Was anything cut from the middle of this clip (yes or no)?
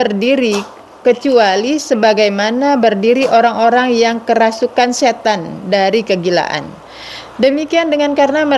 no